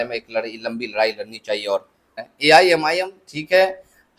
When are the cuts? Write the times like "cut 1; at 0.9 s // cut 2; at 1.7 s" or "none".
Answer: cut 1; at 2.2 s